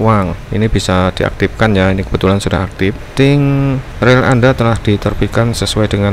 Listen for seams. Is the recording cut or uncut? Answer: cut